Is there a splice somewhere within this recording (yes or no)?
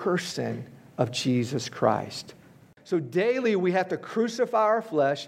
yes